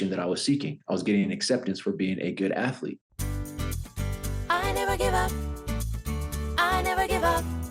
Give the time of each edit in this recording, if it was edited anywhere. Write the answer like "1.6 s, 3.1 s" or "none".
3.1 s